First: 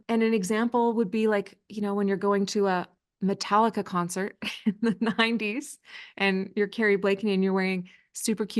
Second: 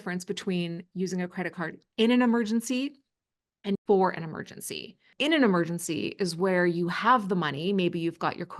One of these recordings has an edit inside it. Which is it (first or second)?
second